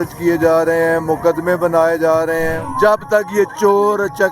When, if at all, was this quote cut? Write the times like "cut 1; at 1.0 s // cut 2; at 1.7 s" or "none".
cut 1; at 2.6 s